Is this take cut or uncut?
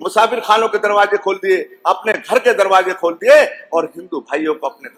uncut